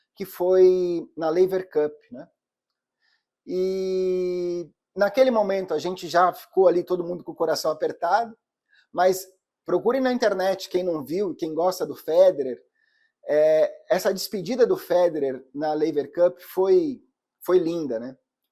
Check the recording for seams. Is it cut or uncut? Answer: uncut